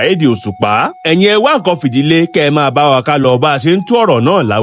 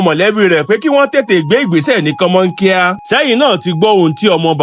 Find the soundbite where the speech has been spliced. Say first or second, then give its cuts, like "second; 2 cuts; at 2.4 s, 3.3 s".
second; 1 cut; at 3.0 s